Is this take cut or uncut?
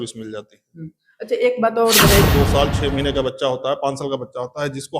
cut